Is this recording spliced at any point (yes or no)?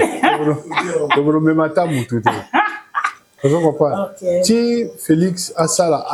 no